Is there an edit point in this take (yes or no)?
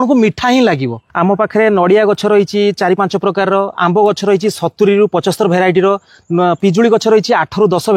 yes